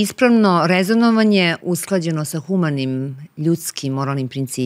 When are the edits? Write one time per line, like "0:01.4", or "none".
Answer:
0:01.6